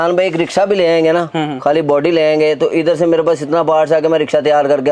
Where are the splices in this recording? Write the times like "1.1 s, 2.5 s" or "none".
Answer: none